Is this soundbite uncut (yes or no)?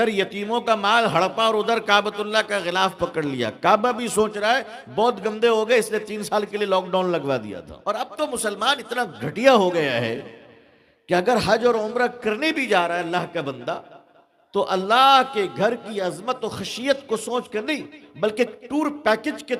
no